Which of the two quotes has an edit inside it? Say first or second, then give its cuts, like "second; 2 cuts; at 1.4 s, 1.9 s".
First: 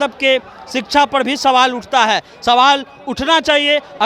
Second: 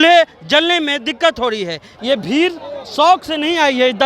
second; 1 cut; at 1.9 s